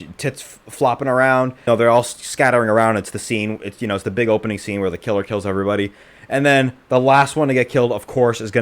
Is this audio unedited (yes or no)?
no